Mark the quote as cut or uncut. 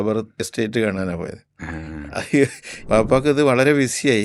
cut